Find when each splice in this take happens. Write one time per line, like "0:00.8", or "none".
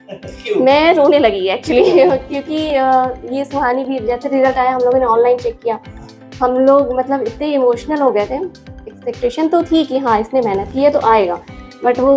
none